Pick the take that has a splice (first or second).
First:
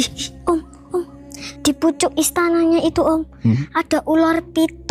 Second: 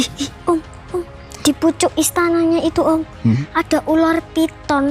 second